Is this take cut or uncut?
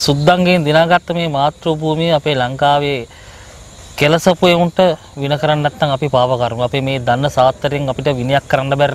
uncut